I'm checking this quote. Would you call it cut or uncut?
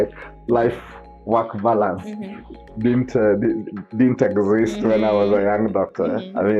uncut